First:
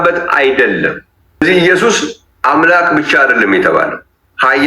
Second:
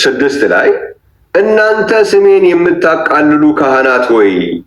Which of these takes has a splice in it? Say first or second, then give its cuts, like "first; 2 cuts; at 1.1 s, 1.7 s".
first; 1 cut; at 1.4 s